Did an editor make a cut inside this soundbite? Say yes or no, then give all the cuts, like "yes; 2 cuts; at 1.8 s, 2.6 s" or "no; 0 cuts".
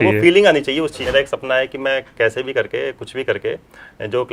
yes; 1 cut; at 1.0 s